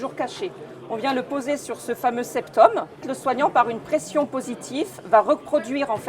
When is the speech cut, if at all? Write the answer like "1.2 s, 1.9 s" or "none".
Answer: 3.1 s